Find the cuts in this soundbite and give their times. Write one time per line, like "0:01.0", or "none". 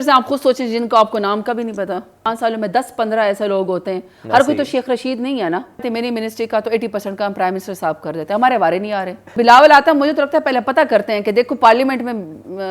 0:02.3
0:05.9
0:09.3